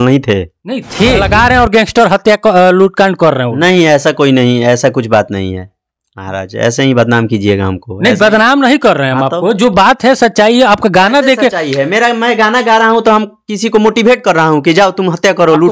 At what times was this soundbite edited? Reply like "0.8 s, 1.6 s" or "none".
1.2 s